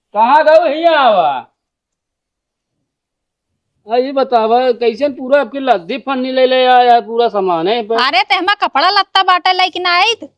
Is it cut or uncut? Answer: uncut